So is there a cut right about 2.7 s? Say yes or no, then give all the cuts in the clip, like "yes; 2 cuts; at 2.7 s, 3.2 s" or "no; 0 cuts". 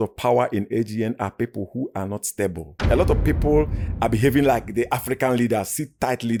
no; 0 cuts